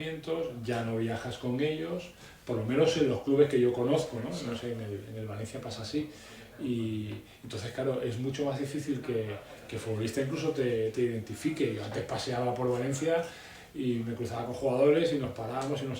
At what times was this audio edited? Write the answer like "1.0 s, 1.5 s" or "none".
none